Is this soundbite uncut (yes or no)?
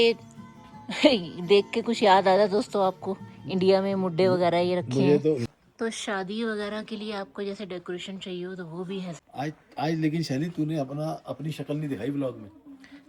no